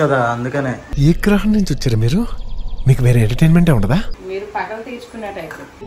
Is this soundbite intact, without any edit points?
no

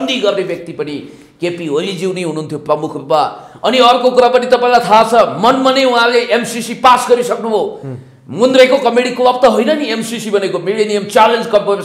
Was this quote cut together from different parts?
no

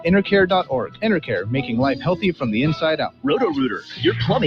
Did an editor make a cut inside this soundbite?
yes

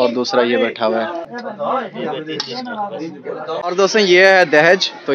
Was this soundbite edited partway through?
yes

